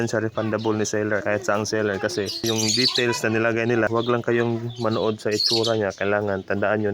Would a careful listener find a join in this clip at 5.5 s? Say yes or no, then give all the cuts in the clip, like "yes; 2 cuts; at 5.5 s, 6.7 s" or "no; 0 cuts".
no; 3 cuts; at 1.2 s, 2.4 s, 3.9 s